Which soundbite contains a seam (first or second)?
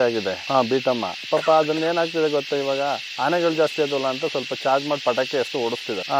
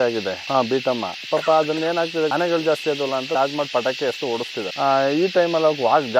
second